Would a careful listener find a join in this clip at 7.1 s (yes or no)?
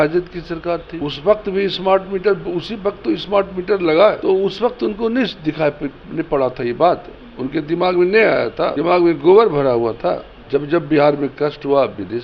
no